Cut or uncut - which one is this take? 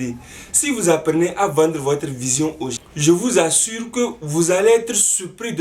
cut